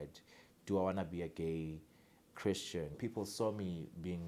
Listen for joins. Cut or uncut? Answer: cut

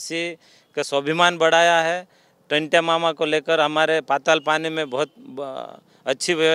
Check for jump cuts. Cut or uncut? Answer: uncut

